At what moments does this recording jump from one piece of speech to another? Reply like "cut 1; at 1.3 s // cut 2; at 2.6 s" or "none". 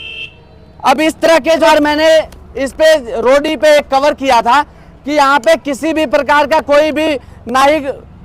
cut 1; at 1.7 s